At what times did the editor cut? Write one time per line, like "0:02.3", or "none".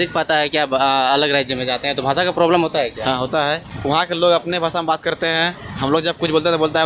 0:03.7

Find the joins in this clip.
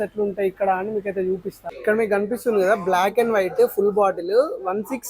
0:01.6

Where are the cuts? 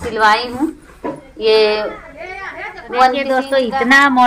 0:03.3

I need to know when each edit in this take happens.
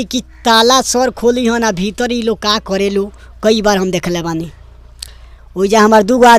none

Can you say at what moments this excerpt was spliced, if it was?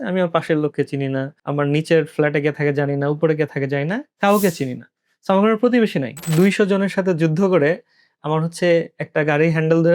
0:01.4
0:06.2

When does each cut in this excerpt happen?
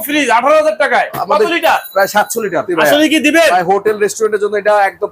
0:02.7

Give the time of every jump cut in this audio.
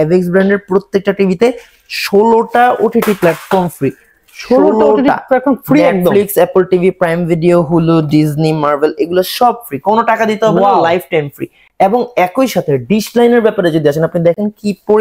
none

